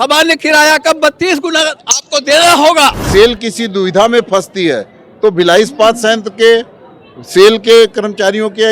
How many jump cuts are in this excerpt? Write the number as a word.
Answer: one